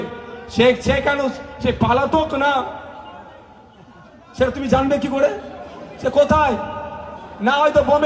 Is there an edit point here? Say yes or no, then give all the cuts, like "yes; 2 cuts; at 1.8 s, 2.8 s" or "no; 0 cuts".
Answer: no; 0 cuts